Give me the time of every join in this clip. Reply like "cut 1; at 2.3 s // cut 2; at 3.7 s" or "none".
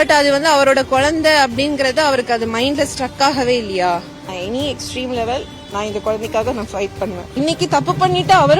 cut 1; at 4.3 s // cut 2; at 7.3 s